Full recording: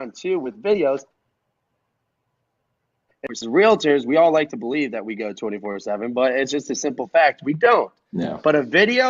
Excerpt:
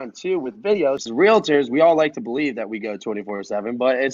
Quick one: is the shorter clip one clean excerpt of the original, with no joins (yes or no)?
no